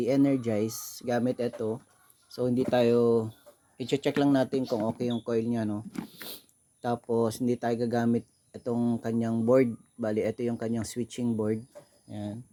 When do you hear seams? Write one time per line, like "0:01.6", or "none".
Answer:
none

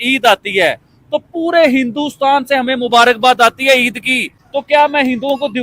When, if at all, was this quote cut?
0:04.3

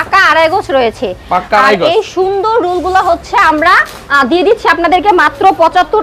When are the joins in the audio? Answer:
none

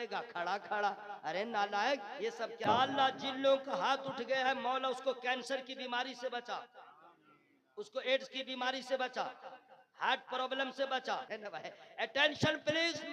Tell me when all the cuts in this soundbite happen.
0:02.6
0:11.3

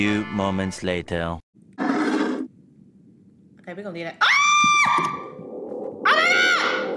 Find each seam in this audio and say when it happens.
0:01.8

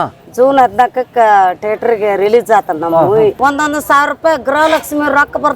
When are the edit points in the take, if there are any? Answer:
0:03.4

